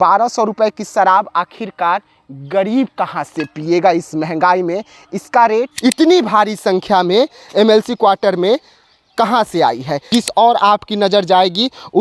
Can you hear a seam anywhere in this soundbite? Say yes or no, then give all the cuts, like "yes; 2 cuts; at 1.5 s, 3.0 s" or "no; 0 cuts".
yes; 2 cuts; at 5.7 s, 10.0 s